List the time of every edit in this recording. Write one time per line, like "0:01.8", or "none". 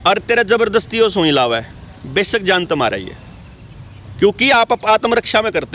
none